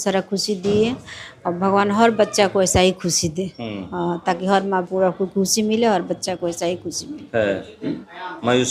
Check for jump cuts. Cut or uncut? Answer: uncut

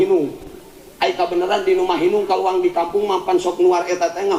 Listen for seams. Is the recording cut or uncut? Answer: uncut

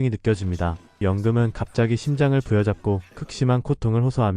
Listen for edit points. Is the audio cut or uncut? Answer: cut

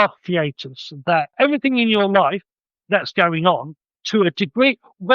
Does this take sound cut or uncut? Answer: cut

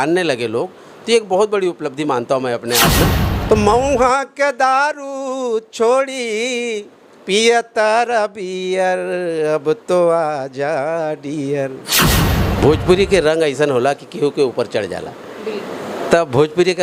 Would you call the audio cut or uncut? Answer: cut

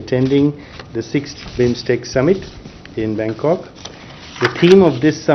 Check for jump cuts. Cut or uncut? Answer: uncut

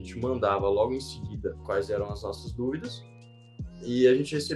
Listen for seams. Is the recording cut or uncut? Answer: cut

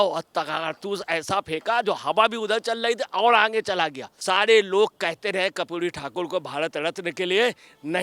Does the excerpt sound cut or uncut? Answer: cut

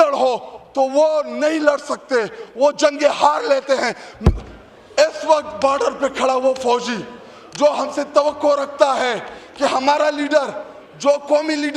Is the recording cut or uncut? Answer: uncut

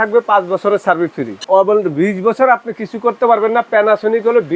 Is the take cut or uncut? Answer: cut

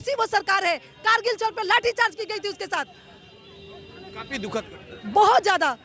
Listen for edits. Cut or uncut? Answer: uncut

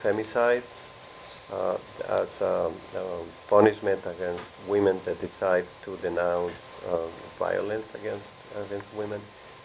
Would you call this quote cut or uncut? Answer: uncut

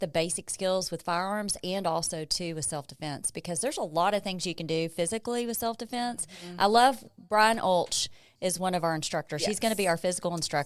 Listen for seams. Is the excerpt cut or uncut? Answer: uncut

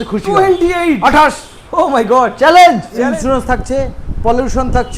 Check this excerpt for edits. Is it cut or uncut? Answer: cut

